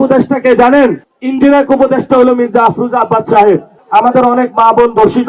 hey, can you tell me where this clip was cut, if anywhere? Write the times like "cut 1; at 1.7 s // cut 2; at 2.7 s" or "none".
cut 1; at 1.1 s // cut 2; at 3.7 s